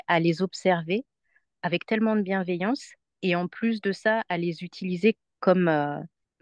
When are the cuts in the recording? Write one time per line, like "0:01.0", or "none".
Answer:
none